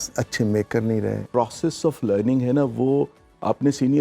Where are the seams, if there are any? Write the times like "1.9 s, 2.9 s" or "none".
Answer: 1.3 s